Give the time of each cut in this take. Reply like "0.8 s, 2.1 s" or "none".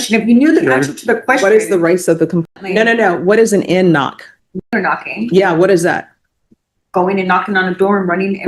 2.5 s, 4.7 s